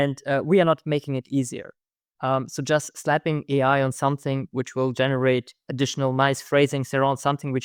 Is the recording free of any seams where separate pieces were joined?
yes; 0 cuts

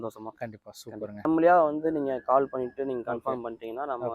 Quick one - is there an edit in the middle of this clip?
yes; 1 cut; at 1.2 s

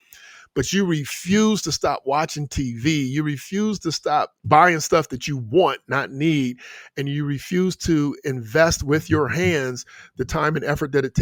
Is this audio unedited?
yes; 0 cuts

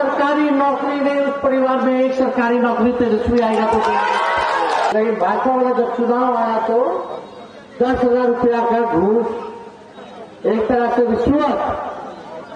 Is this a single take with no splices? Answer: no; 1 cut; at 4.9 s

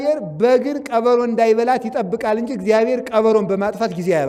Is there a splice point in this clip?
no; 0 cuts

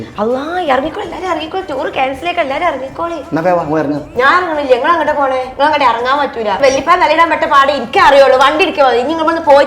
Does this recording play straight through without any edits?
yes; 0 cuts

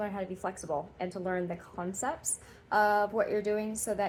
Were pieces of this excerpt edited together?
no; 0 cuts

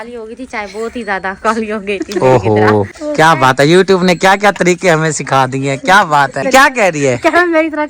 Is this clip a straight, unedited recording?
no; 2 cuts; at 3.0 s, 6.5 s

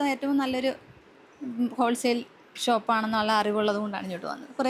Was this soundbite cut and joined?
no; 0 cuts

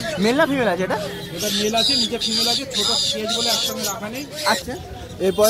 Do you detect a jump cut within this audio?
yes; 1 cut; at 4.6 s

